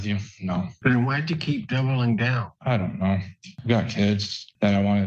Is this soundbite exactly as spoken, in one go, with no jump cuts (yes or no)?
no